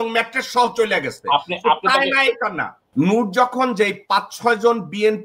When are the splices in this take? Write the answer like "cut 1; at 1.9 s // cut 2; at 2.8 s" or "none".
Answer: cut 1; at 2.9 s